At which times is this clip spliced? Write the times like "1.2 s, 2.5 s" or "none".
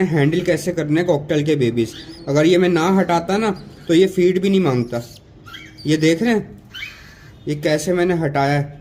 none